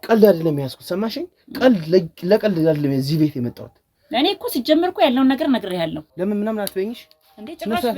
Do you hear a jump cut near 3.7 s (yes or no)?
no